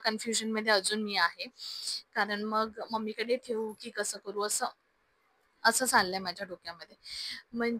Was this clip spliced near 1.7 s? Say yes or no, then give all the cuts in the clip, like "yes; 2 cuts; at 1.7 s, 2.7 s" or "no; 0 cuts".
no; 0 cuts